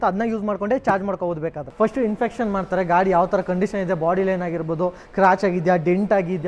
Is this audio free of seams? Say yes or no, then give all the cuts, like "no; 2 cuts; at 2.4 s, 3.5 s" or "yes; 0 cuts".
no; 1 cut; at 1.6 s